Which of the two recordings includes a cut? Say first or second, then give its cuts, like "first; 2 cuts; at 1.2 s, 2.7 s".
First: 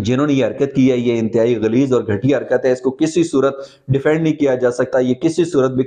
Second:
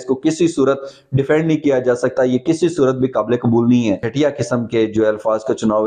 second; 1 cut; at 4.1 s